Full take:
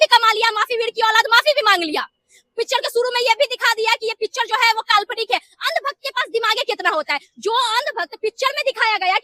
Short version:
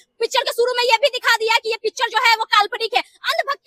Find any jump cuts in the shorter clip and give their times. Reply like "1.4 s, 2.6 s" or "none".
none